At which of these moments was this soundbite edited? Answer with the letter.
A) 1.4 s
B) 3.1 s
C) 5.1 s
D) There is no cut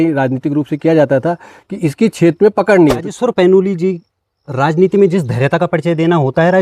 B